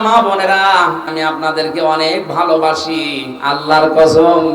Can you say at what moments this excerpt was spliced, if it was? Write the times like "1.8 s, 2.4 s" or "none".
1.1 s